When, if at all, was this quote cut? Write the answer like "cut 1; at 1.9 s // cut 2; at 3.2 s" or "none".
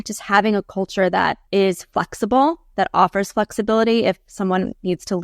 cut 1; at 1.4 s